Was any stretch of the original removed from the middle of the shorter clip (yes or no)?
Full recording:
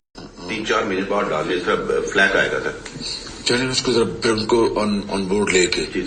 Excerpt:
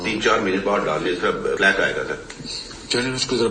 yes